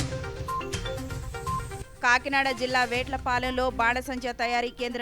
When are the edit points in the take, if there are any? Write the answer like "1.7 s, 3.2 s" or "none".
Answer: 1.6 s